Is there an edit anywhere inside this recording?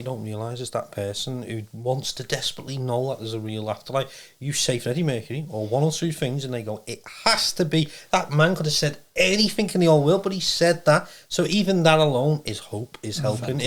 no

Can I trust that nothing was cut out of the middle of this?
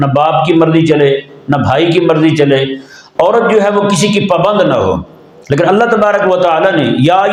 yes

